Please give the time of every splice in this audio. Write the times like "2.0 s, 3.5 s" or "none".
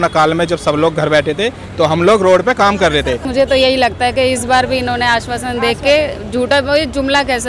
3.2 s